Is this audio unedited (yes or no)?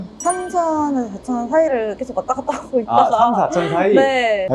yes